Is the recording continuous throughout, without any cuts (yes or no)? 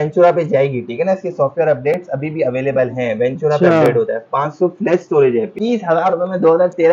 no